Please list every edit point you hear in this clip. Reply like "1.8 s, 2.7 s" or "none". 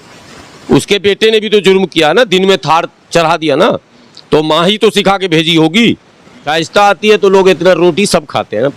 6.5 s

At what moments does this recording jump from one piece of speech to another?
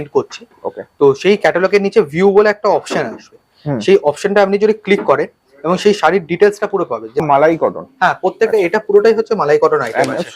7.2 s

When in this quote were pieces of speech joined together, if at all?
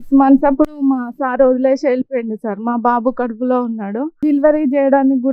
none

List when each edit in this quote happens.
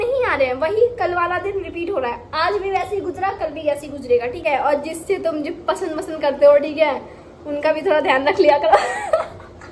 4.4 s

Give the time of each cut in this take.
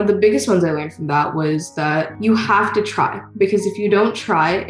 2.1 s

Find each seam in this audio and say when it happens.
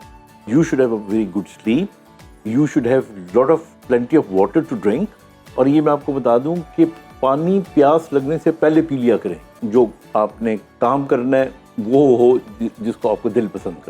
9.5 s

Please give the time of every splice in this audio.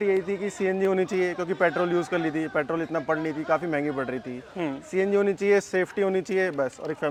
none

